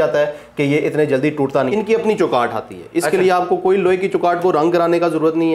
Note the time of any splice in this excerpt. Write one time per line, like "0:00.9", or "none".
0:01.7